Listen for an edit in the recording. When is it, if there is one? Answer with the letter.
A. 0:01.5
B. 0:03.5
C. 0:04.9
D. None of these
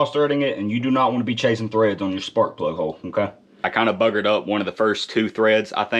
B